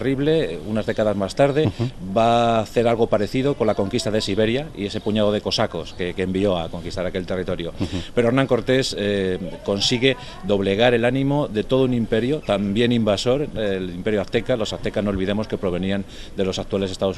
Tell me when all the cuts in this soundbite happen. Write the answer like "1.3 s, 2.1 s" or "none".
none